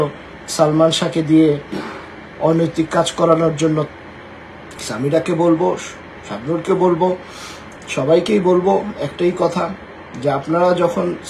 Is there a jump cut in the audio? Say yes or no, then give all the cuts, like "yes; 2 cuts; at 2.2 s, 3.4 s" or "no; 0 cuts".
yes; 1 cut; at 3.9 s